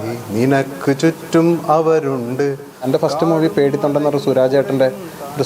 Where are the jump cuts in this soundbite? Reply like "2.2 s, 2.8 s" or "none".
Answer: 2.9 s

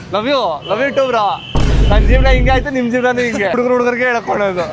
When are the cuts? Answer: 3.5 s

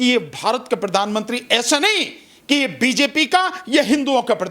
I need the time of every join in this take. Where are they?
none

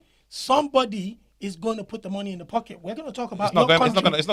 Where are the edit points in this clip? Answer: none

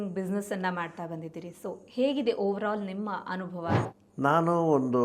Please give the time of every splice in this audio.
3.8 s

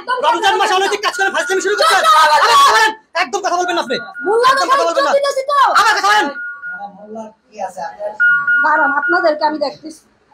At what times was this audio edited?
none

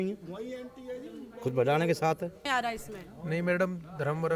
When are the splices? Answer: 2.4 s

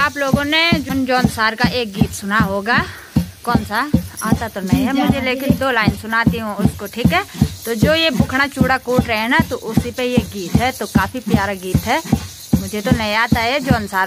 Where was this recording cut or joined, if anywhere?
1.0 s

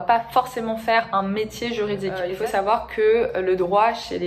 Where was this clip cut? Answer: 2.3 s

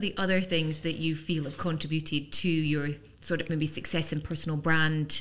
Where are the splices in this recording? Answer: none

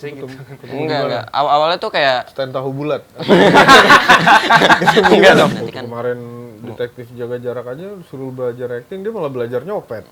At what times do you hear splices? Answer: 5.6 s

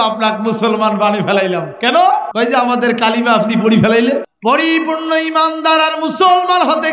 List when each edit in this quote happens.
2.3 s, 4.3 s

